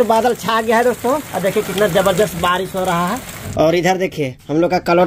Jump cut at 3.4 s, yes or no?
yes